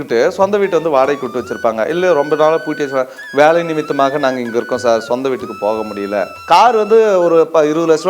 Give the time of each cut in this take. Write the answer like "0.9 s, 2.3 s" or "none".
6.3 s